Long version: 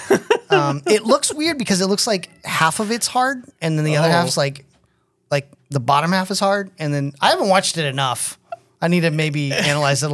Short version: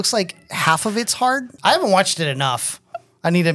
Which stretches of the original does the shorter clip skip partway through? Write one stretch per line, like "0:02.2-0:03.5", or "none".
0:03.5-0:07.1